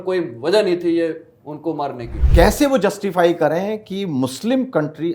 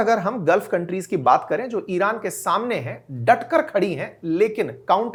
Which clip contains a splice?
first; 1 cut; at 2.1 s

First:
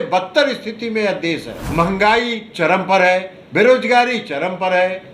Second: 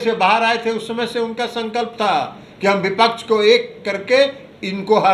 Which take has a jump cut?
first; 1 cut; at 1.6 s

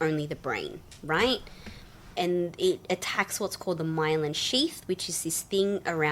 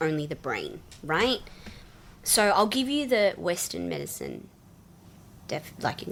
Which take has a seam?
first; 1 cut; at 2.2 s

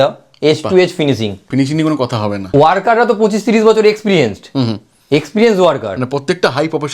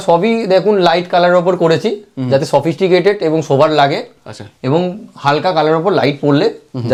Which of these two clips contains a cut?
first; 2 cuts; at 1.5 s, 2.5 s

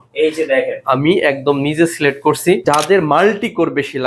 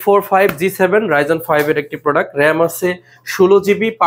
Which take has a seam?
first; 1 cut; at 2.6 s

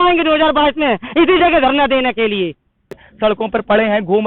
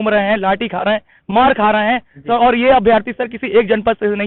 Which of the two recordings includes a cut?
first; 1 cut; at 3.1 s

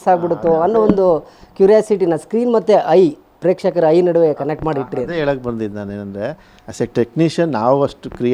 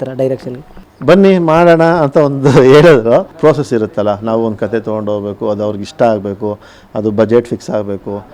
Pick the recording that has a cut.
second; 1 cut; at 3.3 s

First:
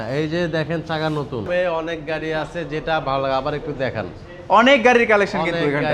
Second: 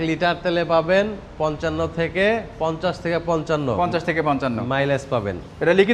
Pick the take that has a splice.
first; 1 cut; at 1.5 s

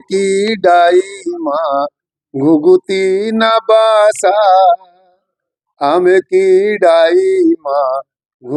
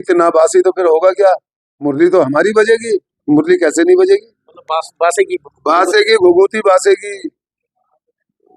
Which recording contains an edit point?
second; 1 cut; at 3.1 s

